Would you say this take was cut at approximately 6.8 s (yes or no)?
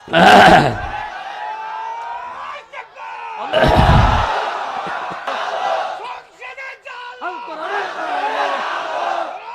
no